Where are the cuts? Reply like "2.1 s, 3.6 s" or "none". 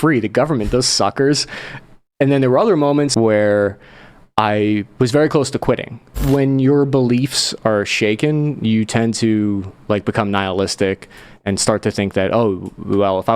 3.1 s, 6.2 s